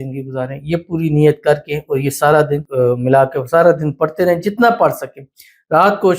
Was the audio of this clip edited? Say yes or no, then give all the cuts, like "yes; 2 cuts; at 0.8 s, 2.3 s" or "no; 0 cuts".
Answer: yes; 1 cut; at 2.7 s